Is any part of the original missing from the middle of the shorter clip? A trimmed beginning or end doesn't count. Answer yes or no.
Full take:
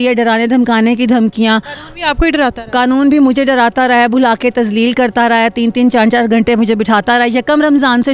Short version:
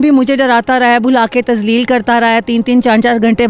no